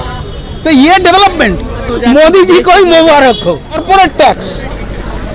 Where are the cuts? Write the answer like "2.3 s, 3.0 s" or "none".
1.9 s, 3.8 s